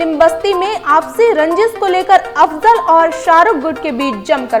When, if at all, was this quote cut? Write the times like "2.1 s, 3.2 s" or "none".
none